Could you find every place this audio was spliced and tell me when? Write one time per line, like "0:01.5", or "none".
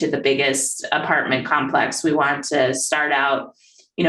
none

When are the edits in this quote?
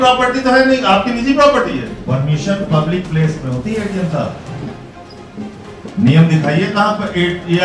0:01.9

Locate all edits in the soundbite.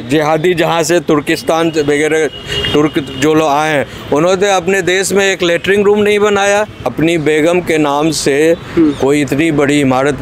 0:06.9

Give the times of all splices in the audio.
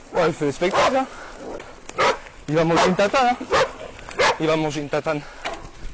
0:01.6

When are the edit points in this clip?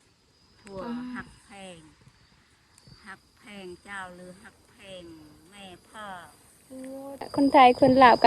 0:07.3

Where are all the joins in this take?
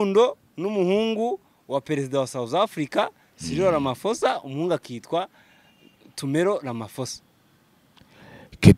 none

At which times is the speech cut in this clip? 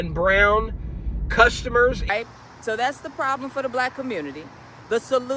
0:02.1

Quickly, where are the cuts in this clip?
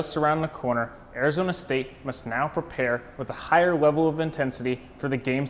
none

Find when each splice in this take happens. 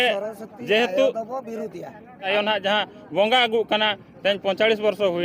0:02.3

